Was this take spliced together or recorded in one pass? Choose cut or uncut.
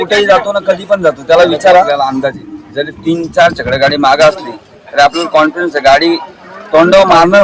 cut